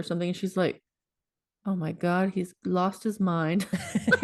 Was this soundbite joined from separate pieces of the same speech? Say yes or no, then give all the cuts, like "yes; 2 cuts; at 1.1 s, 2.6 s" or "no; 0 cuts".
no; 0 cuts